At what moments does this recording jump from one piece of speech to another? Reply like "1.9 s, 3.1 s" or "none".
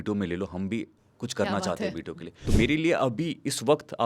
2.4 s